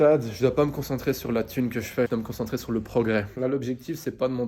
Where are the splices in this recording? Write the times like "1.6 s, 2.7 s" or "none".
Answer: 2.1 s, 3.3 s